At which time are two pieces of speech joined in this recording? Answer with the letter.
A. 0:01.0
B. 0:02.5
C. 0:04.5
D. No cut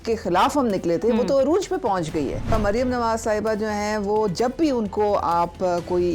B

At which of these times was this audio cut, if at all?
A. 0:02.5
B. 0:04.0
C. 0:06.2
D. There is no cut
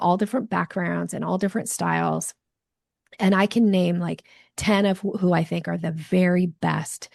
D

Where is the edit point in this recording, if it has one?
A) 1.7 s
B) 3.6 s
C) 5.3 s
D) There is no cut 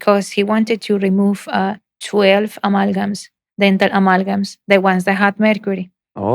D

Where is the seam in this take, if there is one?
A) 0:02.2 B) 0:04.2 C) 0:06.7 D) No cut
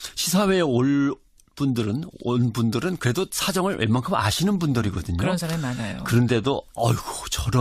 C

